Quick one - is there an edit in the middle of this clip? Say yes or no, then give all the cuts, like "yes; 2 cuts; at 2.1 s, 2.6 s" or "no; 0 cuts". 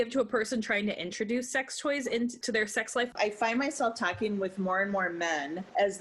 yes; 1 cut; at 3.1 s